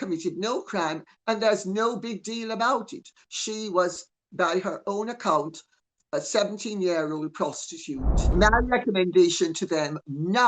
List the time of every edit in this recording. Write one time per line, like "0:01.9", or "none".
0:08.3